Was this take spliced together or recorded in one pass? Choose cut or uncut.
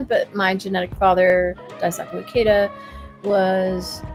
uncut